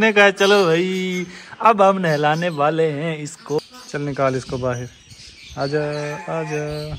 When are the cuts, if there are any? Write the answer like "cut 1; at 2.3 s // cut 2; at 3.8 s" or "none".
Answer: cut 1; at 3.6 s

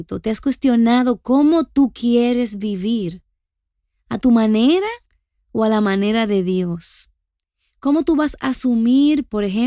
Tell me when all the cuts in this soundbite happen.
none

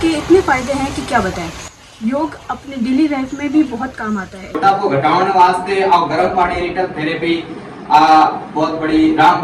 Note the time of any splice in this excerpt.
cut 1; at 4.5 s

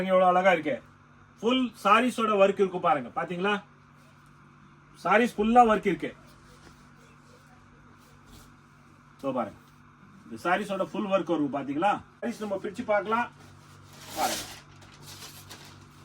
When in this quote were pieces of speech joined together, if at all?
cut 1; at 12.2 s

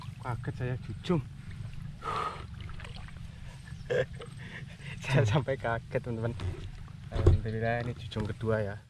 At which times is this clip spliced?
none

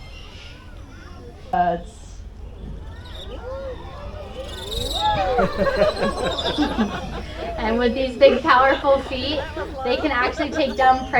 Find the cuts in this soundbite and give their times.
cut 1; at 1.5 s

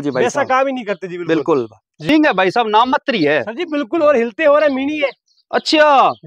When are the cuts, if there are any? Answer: none

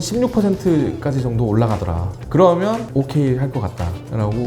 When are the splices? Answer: cut 1; at 2.9 s

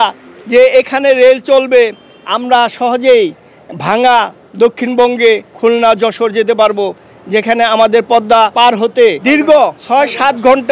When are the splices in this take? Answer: none

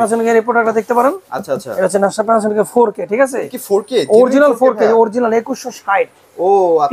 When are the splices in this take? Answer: none

